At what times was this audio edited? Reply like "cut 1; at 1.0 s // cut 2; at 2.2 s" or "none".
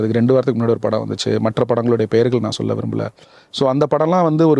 none